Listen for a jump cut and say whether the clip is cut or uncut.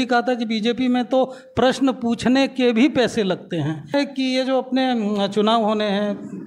cut